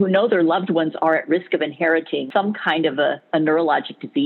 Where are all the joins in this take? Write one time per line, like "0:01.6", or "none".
0:02.3
0:03.2